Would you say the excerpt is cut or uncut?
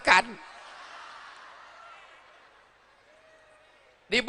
uncut